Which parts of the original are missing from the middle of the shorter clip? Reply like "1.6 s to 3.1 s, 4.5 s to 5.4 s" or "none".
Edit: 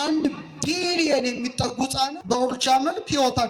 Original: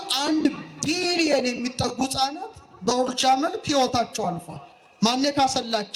2.4 s to 2.7 s